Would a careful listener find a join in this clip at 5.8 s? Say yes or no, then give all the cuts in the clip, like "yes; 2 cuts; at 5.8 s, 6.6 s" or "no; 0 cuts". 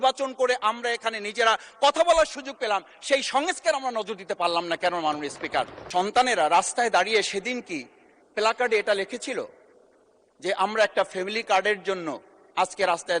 yes; 1 cut; at 5.8 s